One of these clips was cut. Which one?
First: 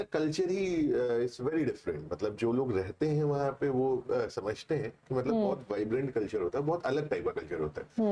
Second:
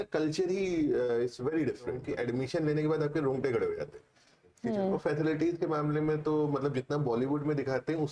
second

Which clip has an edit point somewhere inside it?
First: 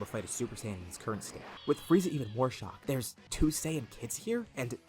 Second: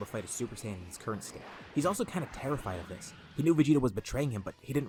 first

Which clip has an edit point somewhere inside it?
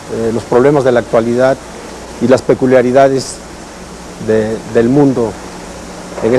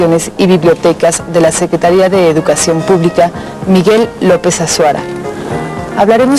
second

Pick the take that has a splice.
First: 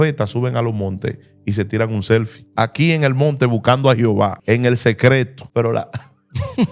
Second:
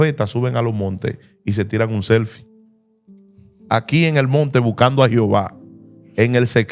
first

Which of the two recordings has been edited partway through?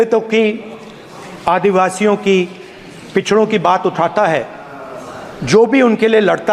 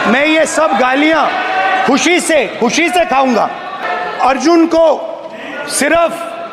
second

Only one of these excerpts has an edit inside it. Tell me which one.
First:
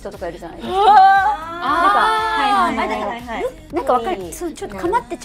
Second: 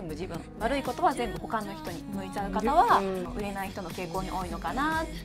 second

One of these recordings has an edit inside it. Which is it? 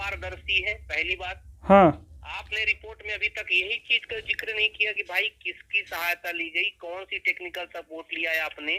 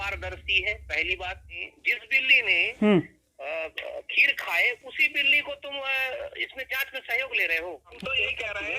second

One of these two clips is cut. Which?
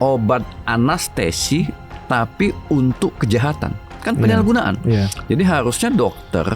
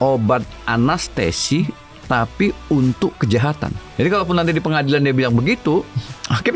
second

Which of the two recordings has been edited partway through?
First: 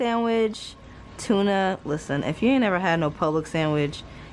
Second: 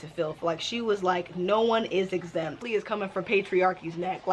second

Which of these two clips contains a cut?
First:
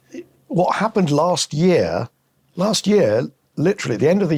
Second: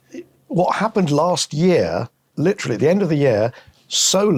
second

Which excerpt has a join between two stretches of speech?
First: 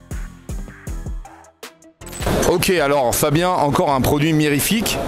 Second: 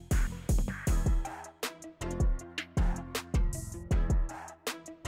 first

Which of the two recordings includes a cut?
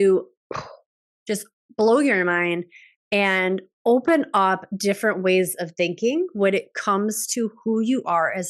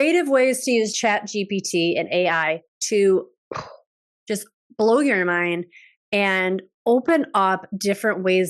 second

